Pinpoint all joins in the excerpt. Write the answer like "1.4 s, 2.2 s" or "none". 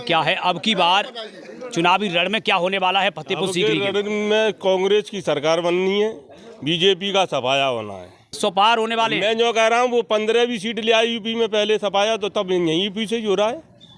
8.4 s